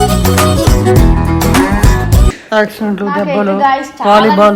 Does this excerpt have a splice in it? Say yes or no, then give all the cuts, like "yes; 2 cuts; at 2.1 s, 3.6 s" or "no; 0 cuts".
no; 0 cuts